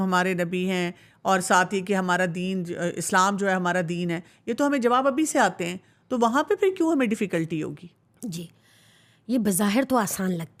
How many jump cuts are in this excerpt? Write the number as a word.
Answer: zero